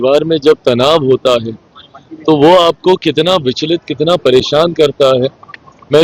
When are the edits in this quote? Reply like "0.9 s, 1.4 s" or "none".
none

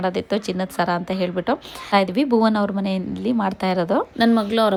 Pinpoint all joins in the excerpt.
none

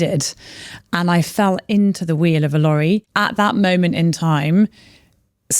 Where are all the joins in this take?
3.1 s

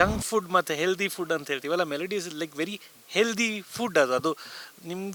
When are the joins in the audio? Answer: none

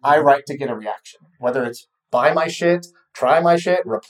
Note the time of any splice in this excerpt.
none

